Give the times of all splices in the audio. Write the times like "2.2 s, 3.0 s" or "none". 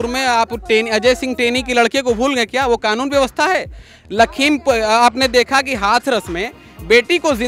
none

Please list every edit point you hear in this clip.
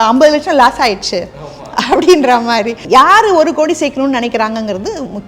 2.8 s

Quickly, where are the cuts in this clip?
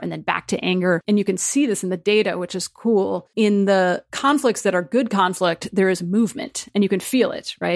1.0 s, 3.2 s, 4.1 s

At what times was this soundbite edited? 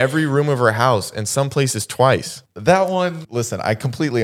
2.5 s, 3.2 s

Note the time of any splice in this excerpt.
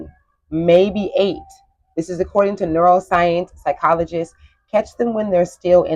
none

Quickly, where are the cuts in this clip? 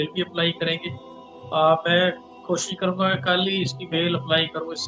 none

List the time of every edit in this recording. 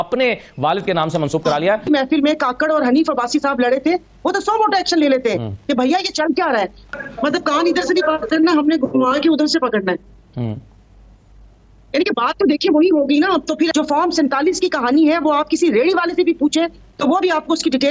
1.9 s, 6.8 s, 13.7 s

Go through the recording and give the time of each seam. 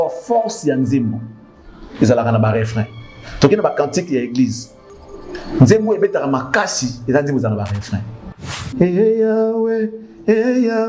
8.5 s

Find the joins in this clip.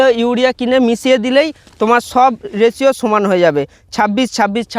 none

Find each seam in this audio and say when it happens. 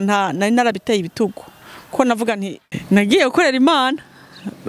2.6 s

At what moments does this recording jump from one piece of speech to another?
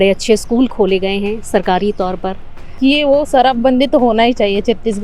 2.7 s

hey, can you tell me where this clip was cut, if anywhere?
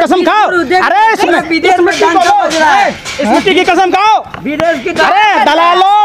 none

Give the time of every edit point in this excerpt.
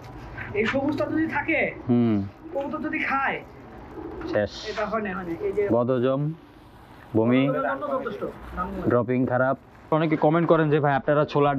9.9 s

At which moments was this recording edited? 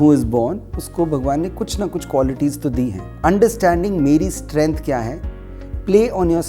3.0 s

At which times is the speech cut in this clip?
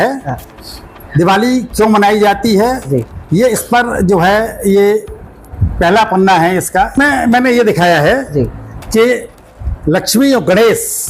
7.0 s

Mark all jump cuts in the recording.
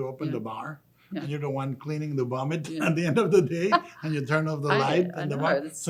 none

